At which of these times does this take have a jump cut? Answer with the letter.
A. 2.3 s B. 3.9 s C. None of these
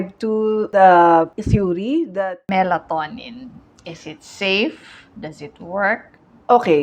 A